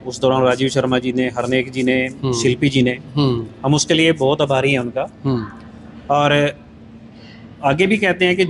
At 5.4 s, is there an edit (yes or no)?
no